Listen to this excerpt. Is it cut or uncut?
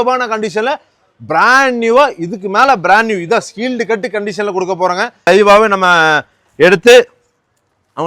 cut